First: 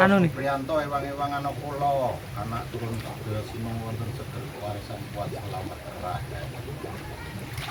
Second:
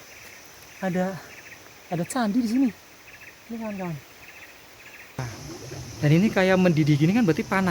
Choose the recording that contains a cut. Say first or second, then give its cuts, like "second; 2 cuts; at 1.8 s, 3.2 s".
second; 1 cut; at 5.3 s